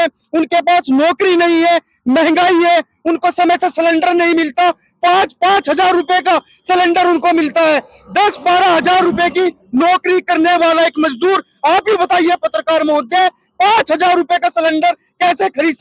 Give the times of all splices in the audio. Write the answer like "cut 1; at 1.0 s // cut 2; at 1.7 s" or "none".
none